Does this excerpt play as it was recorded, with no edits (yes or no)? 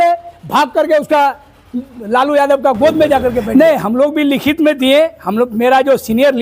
no